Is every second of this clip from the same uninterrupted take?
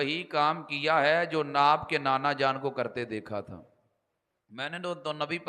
yes; 0 cuts

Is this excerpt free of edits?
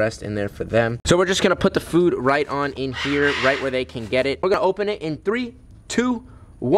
no; 2 cuts; at 1.4 s, 4.5 s

